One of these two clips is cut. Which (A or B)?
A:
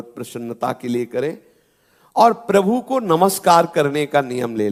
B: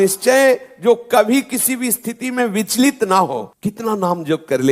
B